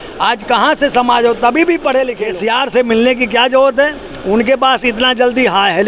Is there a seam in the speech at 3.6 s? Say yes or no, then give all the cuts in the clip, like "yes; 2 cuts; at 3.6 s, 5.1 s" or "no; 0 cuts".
no; 1 cut; at 2.2 s